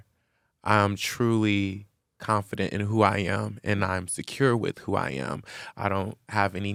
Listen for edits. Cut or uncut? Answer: uncut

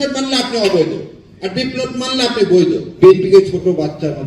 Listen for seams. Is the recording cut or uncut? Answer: cut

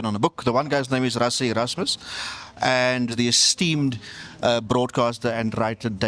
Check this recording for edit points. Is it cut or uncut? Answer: cut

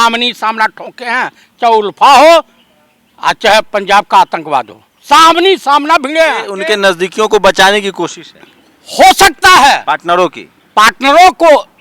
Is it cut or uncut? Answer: cut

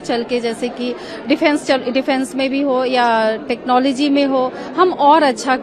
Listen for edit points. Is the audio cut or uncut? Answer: uncut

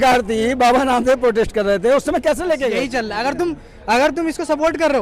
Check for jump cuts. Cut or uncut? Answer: cut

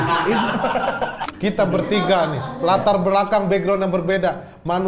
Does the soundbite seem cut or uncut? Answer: cut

